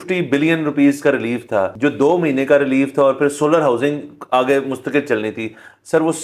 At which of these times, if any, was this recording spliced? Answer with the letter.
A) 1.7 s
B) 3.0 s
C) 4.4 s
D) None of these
A